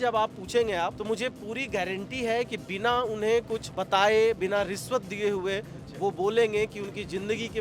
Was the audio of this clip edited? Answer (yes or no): yes